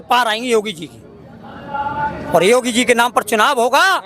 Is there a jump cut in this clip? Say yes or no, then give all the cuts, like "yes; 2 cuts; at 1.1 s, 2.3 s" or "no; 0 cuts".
no; 0 cuts